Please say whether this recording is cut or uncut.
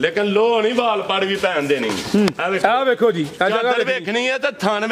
uncut